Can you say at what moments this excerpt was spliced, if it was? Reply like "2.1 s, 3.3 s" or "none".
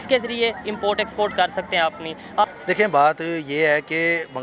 2.5 s